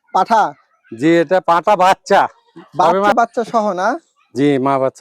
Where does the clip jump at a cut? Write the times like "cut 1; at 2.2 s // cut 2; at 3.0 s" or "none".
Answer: cut 1; at 3.1 s